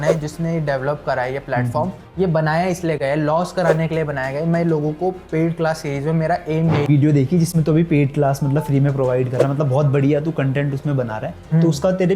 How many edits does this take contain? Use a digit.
1